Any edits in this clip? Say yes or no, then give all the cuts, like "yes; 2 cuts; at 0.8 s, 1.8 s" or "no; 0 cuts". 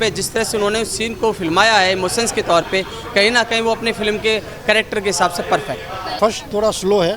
yes; 1 cut; at 6.1 s